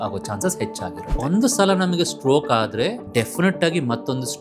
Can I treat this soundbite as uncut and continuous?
no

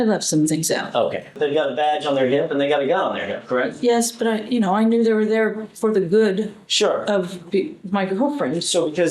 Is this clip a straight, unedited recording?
no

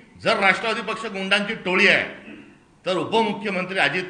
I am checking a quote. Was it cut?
no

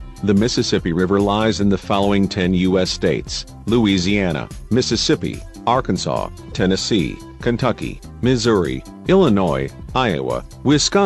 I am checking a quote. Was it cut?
yes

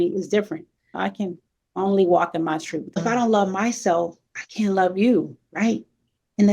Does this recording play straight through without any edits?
no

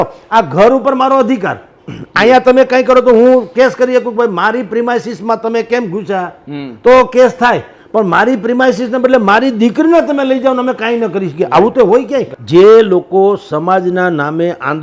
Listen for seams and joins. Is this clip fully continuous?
no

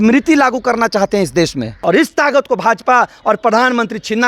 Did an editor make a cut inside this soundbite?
yes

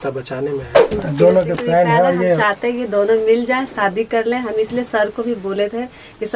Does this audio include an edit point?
yes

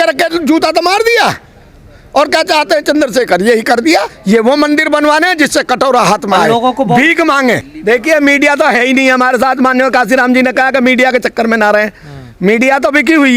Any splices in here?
yes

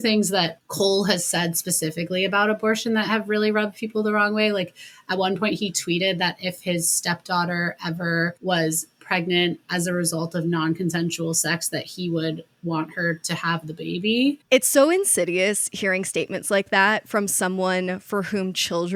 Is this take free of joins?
yes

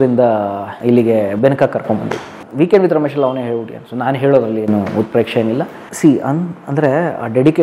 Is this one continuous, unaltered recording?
yes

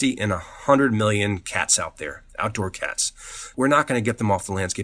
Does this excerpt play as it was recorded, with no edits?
no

